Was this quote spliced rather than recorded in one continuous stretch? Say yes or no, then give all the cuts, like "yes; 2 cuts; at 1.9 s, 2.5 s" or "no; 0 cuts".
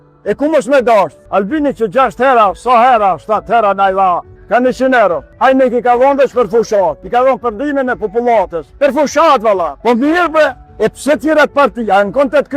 yes; 6 cuts; at 1.2 s, 4.3 s, 5.3 s, 7.0 s, 8.6 s, 10.6 s